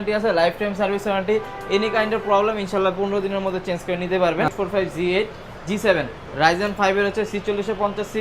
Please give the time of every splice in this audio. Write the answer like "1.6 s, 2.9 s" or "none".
4.5 s

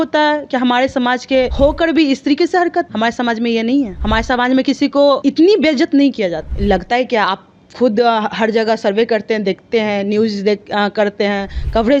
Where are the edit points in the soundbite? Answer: 1.5 s, 2.9 s, 4.0 s, 5.2 s, 6.5 s

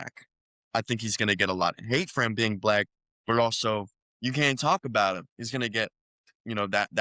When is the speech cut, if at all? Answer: none

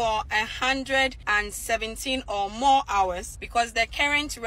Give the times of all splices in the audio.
1.2 s, 3.3 s

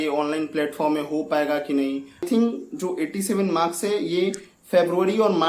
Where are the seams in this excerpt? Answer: 2.2 s

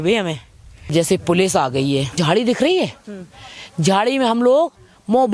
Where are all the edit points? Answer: 0.9 s, 2.2 s

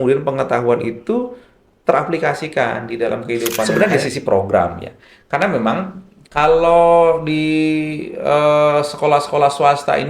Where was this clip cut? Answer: 3.7 s

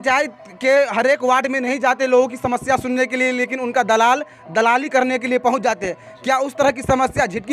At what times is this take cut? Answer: none

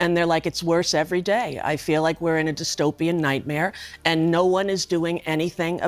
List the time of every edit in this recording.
none

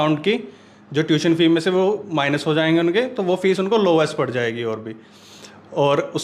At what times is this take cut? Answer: none

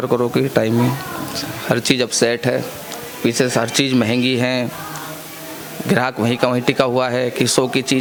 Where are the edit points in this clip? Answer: none

